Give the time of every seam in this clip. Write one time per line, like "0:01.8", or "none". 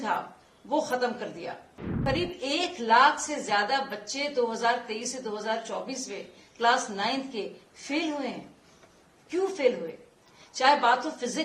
0:01.9